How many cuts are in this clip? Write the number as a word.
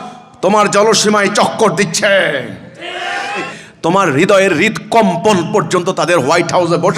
one